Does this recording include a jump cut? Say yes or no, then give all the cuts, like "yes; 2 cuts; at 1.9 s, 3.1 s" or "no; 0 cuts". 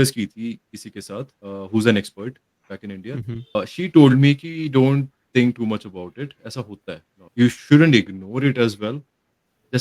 yes; 3 cuts; at 1.4 s, 3.5 s, 7.1 s